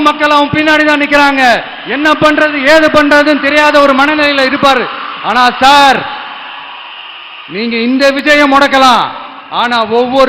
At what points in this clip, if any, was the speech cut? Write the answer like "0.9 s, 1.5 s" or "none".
none